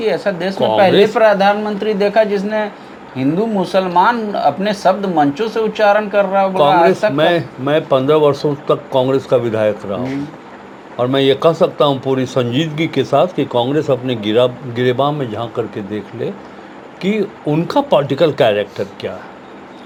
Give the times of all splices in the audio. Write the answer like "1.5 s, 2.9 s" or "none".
none